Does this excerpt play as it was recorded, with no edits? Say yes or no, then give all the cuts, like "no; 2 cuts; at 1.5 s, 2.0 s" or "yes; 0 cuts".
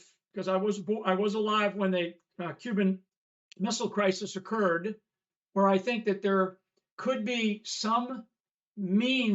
no; 1 cut; at 5.3 s